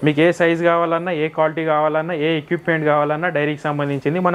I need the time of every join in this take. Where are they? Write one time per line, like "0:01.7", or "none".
none